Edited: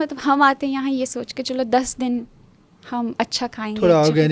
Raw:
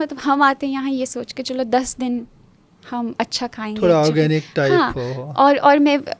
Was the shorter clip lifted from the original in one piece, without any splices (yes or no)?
yes